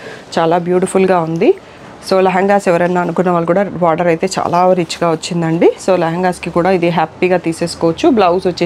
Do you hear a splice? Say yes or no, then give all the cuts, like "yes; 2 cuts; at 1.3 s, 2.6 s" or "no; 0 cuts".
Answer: no; 0 cuts